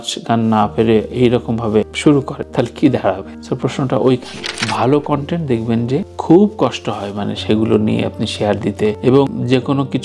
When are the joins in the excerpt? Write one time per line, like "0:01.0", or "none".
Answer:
0:04.6